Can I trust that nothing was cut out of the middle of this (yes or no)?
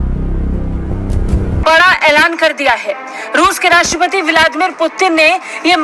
no